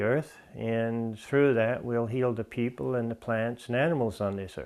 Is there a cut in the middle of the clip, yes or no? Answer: no